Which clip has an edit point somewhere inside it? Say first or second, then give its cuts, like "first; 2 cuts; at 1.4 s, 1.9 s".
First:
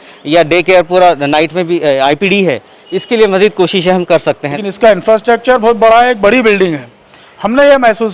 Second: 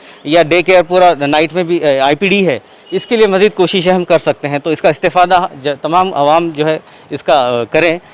first; 1 cut; at 4.5 s